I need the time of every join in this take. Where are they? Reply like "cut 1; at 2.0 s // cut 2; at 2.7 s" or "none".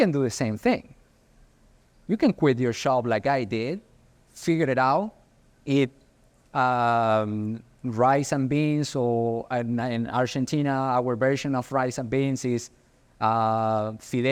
none